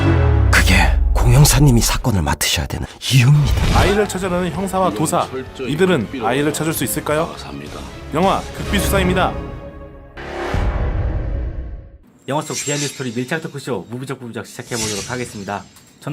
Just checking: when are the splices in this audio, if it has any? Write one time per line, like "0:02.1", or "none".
0:09.8